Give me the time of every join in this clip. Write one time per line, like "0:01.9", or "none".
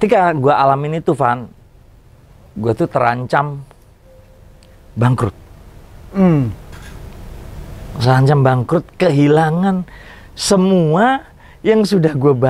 none